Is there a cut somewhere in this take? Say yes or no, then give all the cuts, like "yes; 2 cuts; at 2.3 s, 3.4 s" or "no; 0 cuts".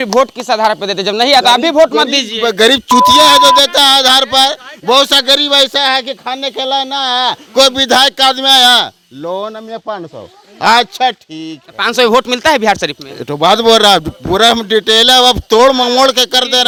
no; 0 cuts